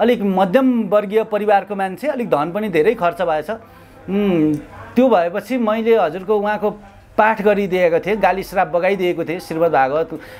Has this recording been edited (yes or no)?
no